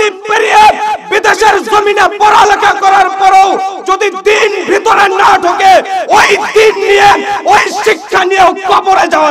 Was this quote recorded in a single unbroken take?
yes; 0 cuts

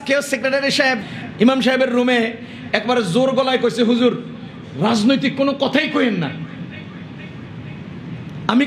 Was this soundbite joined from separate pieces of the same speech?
yes; 1 cut; at 1.0 s

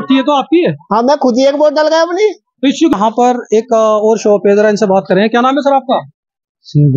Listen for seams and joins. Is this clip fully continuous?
no; 1 cut; at 2.9 s

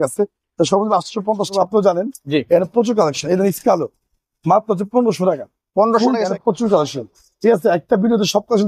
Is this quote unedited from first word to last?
no; 2 cuts; at 1.5 s, 6.3 s

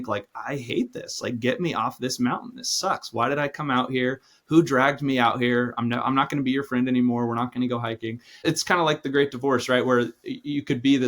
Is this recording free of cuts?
no; 1 cut; at 8.4 s

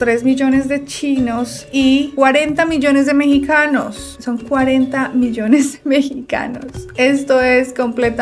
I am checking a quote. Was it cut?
no; 0 cuts

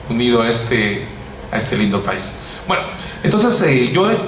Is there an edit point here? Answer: no; 0 cuts

